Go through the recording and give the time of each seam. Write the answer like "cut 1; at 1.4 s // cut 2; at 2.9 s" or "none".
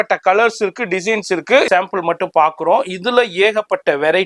cut 1; at 1.7 s